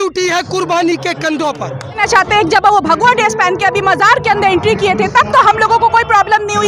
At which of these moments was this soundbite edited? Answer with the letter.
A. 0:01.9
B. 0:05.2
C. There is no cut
A